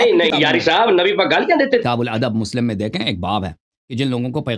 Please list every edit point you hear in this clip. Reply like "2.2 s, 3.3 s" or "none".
1.8 s